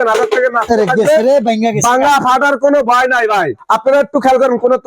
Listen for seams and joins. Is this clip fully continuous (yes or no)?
no